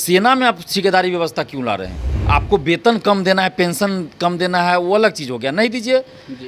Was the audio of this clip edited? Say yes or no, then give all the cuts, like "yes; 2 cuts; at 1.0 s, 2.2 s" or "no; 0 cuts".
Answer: yes; 1 cut; at 2.1 s